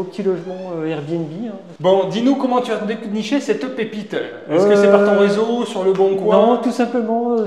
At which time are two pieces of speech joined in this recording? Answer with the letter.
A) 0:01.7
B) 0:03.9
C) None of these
A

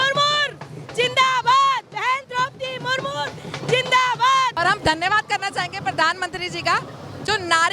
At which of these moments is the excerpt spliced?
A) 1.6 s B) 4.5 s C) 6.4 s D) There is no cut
B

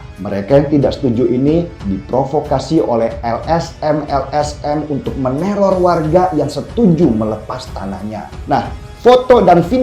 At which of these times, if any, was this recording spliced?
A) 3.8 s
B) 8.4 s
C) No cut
B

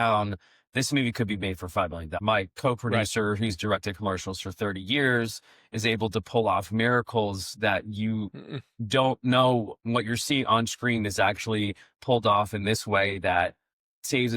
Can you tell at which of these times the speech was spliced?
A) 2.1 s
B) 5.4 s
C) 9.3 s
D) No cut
A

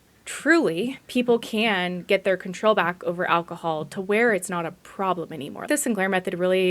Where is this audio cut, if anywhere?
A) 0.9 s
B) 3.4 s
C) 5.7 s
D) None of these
C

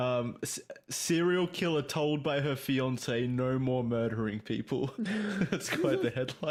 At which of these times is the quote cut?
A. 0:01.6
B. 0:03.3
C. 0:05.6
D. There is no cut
D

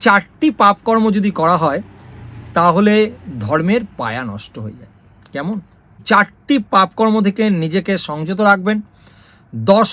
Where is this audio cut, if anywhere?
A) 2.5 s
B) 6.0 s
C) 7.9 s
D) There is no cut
B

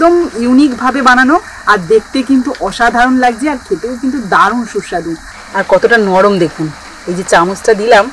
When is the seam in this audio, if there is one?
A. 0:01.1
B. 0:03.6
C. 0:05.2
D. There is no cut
C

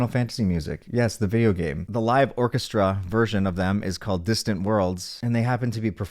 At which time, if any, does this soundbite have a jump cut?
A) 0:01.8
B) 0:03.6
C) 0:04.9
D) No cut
A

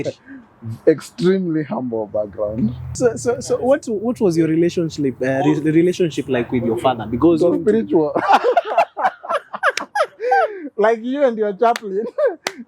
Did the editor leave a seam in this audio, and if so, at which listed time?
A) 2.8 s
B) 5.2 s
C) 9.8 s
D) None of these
A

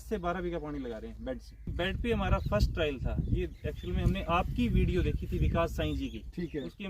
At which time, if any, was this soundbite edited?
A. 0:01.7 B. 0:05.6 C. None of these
A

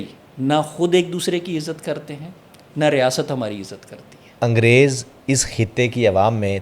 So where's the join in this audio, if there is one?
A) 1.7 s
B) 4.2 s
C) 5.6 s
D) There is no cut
B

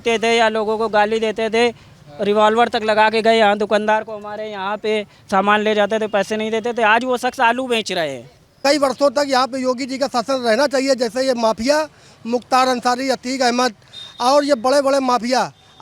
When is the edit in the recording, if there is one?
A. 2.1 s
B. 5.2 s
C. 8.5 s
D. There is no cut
C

